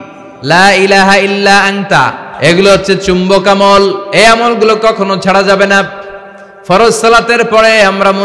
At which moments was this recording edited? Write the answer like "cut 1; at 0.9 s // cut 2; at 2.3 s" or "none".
cut 1; at 2.2 s